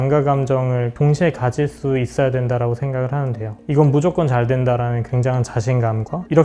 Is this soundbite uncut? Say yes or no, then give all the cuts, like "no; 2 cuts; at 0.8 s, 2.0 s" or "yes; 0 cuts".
no; 1 cut; at 0.9 s